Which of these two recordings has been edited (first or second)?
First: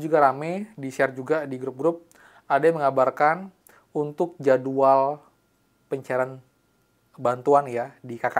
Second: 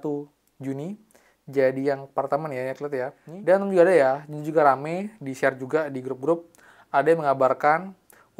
second